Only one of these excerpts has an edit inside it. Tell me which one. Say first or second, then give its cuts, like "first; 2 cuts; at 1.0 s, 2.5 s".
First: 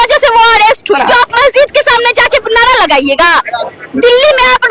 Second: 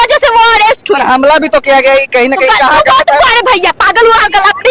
first; 1 cut; at 1.1 s